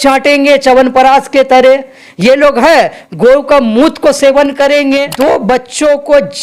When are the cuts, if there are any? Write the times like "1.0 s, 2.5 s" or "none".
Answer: 5.0 s